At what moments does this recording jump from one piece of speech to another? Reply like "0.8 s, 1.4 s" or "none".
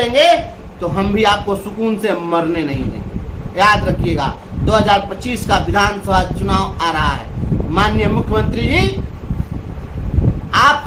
none